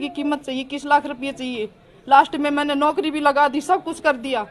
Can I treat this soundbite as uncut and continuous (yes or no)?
yes